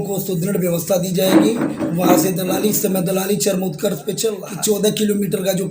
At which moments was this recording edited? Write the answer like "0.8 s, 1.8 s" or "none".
4.4 s